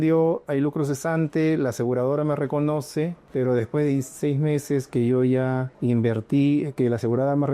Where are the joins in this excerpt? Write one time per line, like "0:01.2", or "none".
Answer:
0:03.2
0:05.7